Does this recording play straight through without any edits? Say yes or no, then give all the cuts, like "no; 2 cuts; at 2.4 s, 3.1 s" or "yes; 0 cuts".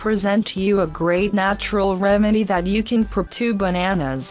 yes; 0 cuts